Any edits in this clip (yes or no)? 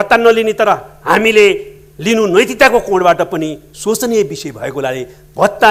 no